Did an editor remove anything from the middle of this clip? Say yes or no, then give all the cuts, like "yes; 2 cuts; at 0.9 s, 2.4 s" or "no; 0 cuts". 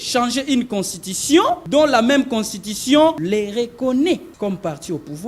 yes; 3 cuts; at 1.6 s, 3.2 s, 4.3 s